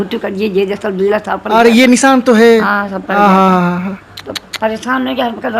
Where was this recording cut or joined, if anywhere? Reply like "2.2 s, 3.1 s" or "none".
none